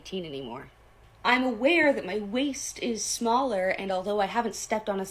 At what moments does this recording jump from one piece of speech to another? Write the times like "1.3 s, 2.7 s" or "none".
1.6 s